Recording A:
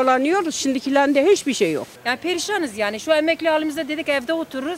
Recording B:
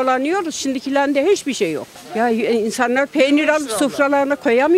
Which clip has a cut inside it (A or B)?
A